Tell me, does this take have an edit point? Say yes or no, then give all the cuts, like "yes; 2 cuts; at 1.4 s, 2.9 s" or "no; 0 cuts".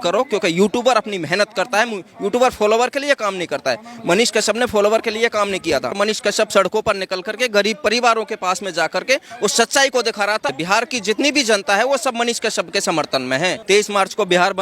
yes; 3 cuts; at 5.9 s, 10.5 s, 13.6 s